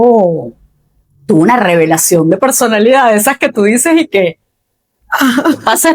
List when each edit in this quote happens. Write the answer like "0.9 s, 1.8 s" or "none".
none